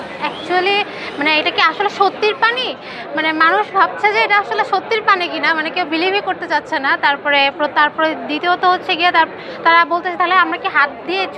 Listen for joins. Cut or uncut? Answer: uncut